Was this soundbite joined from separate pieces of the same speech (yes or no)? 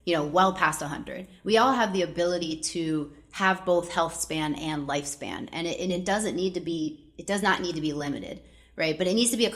no